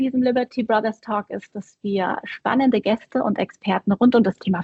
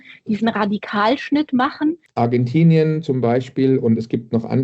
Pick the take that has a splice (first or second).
second